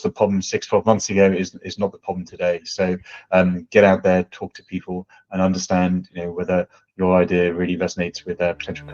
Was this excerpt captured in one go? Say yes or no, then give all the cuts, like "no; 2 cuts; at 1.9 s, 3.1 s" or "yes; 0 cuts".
yes; 0 cuts